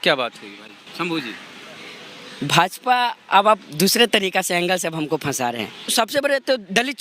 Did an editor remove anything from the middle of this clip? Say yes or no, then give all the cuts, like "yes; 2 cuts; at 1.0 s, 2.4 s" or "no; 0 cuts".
yes; 1 cut; at 5.9 s